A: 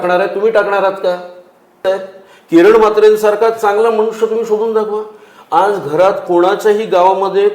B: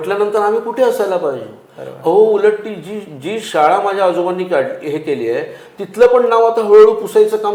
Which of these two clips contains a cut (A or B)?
A